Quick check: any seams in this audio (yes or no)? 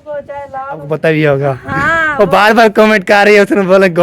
yes